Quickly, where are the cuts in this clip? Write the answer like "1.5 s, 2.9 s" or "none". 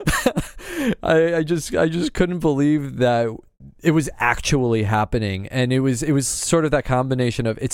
none